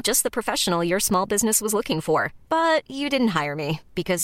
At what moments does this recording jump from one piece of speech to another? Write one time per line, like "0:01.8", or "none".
none